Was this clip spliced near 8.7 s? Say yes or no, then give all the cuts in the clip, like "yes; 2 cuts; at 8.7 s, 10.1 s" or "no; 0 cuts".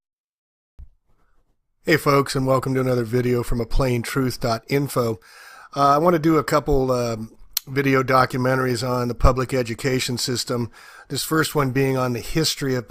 yes; 1 cut; at 8.7 s